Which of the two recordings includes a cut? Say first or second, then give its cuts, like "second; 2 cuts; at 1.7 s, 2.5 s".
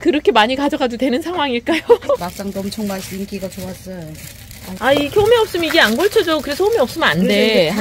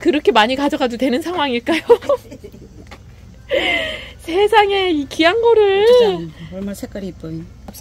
first; 2 cuts; at 2.2 s, 4.7 s